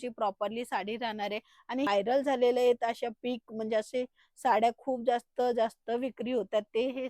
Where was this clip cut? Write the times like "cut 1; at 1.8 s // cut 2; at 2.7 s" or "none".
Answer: cut 1; at 1.9 s